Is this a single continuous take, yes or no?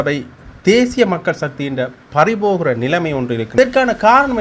no